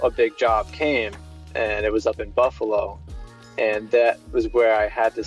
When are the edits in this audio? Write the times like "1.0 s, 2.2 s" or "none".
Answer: none